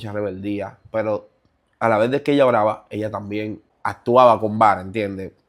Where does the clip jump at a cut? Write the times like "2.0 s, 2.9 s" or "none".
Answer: 3.7 s